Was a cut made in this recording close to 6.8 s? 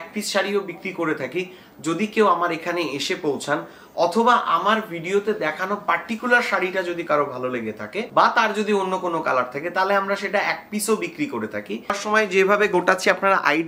no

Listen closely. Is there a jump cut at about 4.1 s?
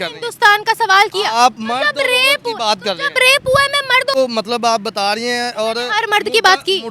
yes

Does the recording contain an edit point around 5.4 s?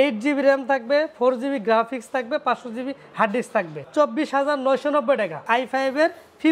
yes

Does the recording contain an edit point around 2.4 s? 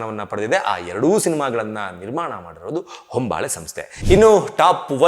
no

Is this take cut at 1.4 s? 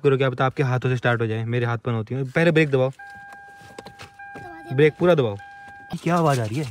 no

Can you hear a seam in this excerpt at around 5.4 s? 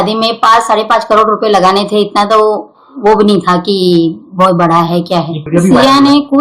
yes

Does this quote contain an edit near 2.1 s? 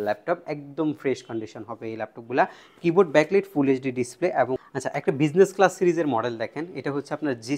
no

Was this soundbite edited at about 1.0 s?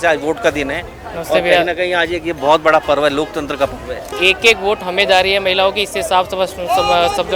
no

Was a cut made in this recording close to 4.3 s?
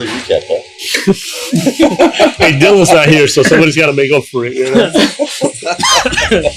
no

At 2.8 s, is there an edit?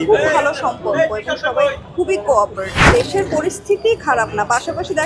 yes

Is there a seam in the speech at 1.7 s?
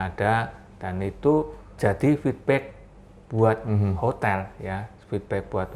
yes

